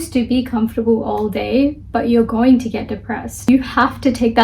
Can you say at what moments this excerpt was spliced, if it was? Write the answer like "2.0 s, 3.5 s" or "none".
3.5 s